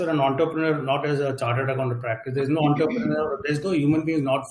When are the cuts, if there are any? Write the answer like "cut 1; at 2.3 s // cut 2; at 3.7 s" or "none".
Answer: none